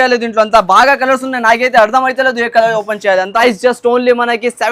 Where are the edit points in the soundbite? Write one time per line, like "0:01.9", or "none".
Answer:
0:03.3